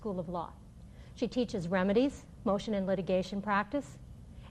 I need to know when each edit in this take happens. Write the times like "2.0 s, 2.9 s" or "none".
3.4 s